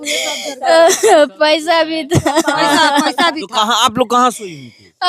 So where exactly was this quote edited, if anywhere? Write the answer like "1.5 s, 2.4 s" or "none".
none